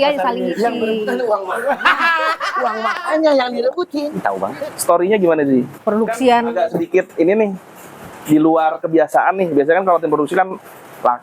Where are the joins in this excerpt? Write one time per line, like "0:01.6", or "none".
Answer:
0:04.4